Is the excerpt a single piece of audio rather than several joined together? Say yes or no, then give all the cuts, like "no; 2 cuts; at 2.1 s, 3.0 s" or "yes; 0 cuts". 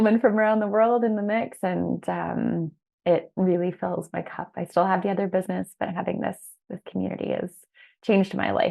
yes; 0 cuts